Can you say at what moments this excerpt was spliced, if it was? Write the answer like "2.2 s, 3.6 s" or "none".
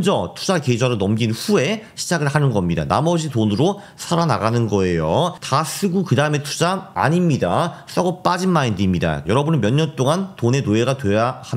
6.9 s, 9.2 s